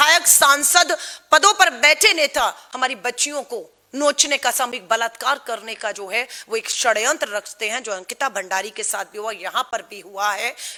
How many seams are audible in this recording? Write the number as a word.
zero